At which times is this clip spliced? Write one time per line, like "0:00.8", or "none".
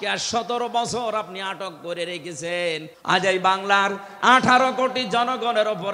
0:02.9